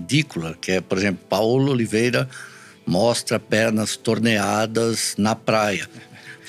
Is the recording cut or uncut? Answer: uncut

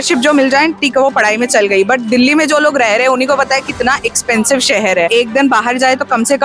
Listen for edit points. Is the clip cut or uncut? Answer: cut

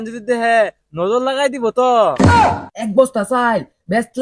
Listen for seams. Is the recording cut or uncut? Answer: cut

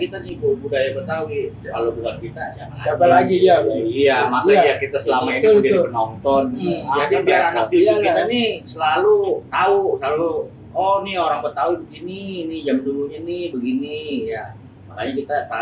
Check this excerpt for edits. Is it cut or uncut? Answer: uncut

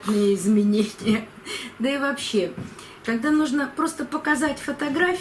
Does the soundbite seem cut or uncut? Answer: cut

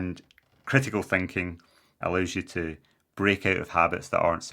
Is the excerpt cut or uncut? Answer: cut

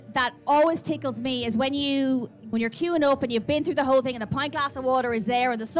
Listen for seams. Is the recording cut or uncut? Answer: cut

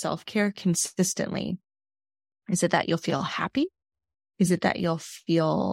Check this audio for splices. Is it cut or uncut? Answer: uncut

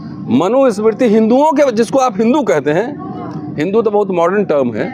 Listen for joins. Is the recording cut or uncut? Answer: uncut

